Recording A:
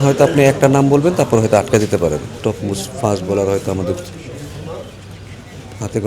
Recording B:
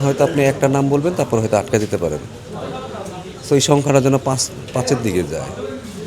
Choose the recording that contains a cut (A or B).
A